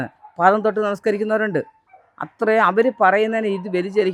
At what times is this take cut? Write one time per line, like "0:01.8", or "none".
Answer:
none